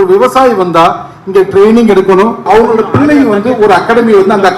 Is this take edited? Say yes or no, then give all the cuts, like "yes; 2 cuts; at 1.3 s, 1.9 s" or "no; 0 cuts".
yes; 1 cut; at 2.4 s